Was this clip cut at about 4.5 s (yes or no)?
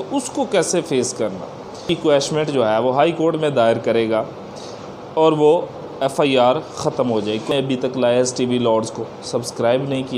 no